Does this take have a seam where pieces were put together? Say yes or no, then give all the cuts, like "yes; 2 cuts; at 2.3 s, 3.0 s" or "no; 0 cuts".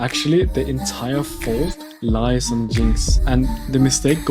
yes; 1 cut; at 3.4 s